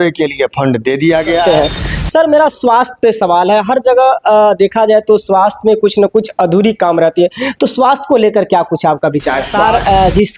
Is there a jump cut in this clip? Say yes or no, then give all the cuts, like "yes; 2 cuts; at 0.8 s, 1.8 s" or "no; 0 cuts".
yes; 2 cuts; at 1.4 s, 9.5 s